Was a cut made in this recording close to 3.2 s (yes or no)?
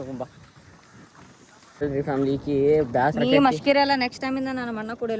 no